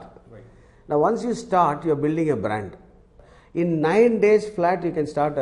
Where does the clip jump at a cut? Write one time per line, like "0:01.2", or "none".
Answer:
0:03.2